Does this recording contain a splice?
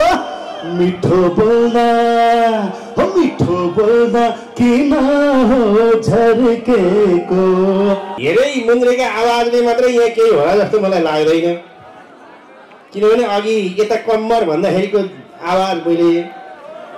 yes; 1 cut; at 8.1 s

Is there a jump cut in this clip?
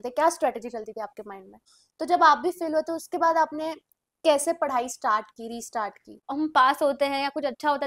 yes; 2 cuts; at 1.6 s, 6.2 s

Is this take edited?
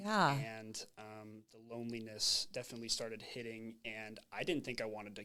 no; 0 cuts

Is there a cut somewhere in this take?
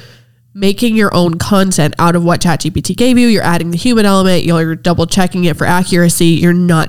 no; 0 cuts

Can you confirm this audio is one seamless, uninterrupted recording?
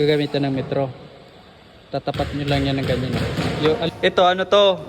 no; 1 cut; at 3.9 s

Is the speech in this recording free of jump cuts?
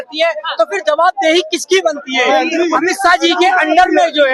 yes; 0 cuts

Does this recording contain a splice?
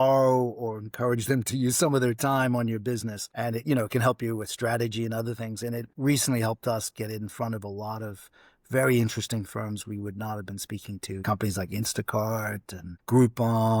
no; 0 cuts

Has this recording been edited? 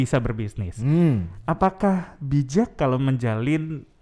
no; 0 cuts

